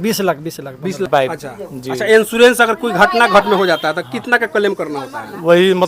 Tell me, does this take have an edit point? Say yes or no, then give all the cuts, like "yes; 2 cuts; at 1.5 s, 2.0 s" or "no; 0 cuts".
yes; 1 cut; at 1.1 s